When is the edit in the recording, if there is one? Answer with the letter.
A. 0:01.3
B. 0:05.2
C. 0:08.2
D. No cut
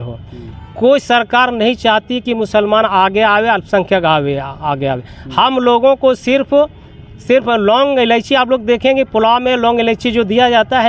D